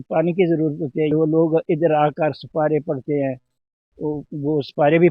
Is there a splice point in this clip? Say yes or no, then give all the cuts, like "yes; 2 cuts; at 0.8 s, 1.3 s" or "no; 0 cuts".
yes; 1 cut; at 1.1 s